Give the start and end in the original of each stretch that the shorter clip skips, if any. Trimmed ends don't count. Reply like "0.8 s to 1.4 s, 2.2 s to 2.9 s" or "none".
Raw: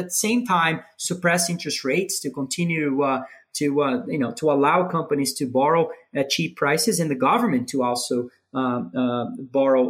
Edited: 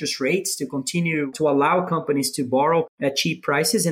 2.9 s to 4.3 s, 6.0 s to 6.1 s